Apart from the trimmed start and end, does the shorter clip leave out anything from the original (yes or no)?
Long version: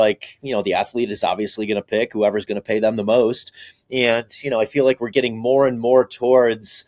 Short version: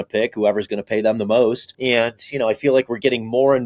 yes